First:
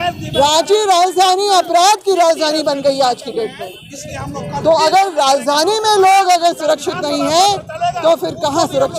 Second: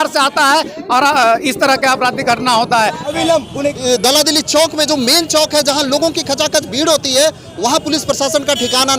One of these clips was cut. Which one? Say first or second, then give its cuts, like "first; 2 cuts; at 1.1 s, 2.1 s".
second; 1 cut; at 3.4 s